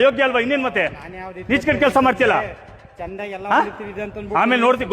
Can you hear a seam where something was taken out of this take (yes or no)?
yes